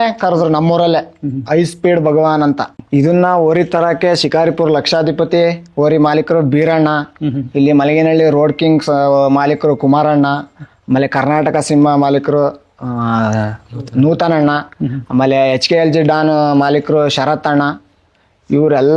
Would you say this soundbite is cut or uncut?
cut